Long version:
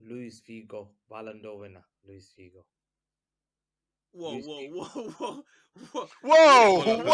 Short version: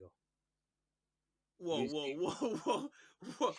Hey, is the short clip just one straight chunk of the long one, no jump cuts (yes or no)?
yes